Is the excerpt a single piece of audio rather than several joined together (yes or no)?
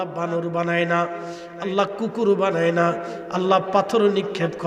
yes